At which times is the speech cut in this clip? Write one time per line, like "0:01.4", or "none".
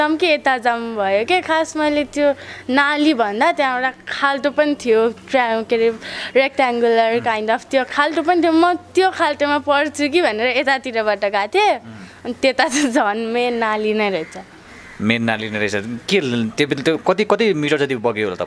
none